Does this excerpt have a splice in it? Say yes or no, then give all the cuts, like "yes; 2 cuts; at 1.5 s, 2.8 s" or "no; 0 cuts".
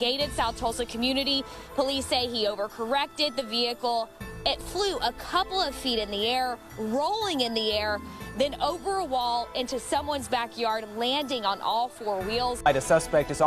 yes; 1 cut; at 6.1 s